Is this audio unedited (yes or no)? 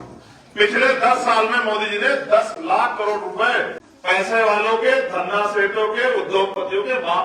no